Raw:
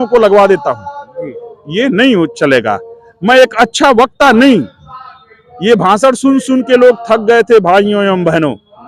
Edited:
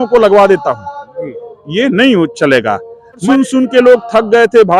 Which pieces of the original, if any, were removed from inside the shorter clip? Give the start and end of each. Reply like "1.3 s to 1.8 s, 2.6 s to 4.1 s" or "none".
3.2 s to 6.2 s

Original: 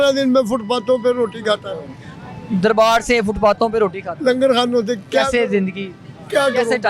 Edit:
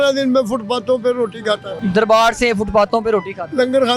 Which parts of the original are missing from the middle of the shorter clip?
1.7 s to 2.4 s

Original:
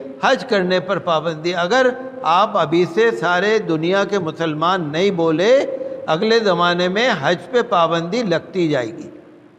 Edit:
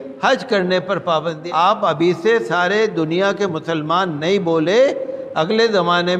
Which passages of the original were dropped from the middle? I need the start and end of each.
1.4 s to 2.1 s

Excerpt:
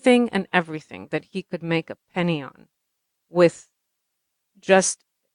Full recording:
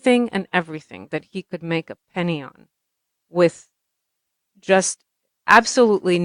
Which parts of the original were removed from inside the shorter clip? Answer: none

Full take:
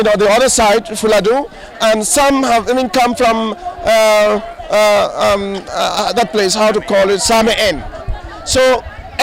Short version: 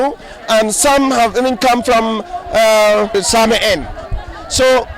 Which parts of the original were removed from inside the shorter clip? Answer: 4.5 s to 7.1 s

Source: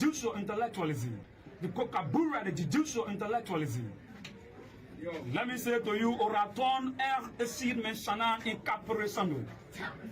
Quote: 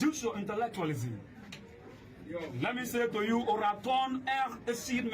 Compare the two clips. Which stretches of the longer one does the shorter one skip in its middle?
1.1 s to 3.8 s

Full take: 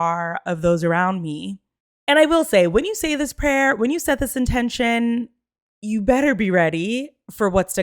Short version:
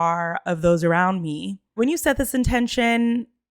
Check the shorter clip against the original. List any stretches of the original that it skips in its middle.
1.7 s to 3.8 s

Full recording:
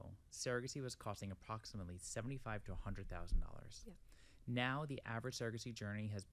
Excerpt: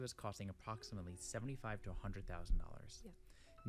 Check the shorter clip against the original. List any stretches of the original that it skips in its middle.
none

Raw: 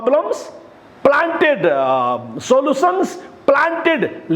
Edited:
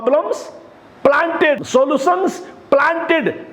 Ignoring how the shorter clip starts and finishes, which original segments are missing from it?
1.6 s to 2.3 s

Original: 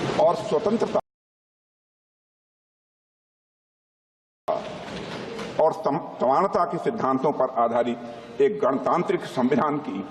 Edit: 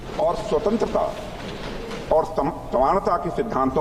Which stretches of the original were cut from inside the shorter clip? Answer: 1.0 s to 4.5 s

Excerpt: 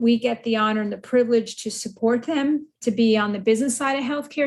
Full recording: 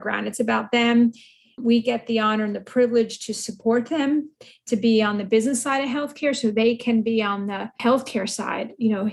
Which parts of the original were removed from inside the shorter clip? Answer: 4.3 s to 4.6 s

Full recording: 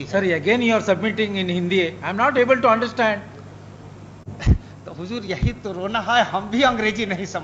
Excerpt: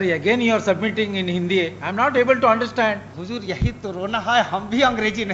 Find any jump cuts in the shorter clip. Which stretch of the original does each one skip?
3.3 s to 4.9 s

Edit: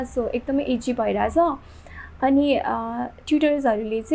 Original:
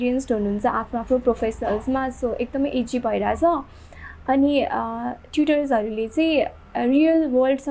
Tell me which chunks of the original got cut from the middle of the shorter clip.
none

